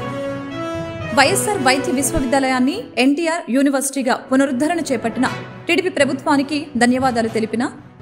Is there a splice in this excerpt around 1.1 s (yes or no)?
yes